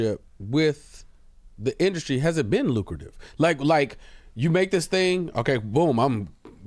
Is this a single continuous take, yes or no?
yes